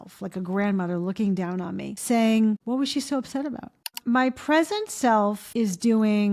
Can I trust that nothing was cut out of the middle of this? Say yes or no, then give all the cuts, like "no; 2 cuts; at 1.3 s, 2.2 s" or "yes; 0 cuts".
no; 4 cuts; at 1.9 s, 2.6 s, 4.0 s, 5.4 s